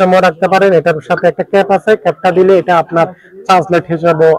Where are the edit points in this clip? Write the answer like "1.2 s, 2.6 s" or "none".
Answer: none